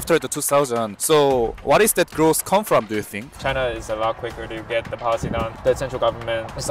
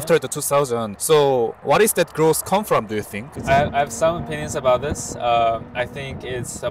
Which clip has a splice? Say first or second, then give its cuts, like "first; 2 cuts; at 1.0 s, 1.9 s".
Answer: first; 1 cut; at 3.3 s